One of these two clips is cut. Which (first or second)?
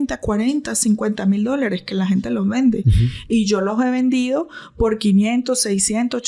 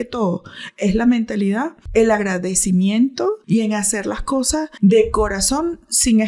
second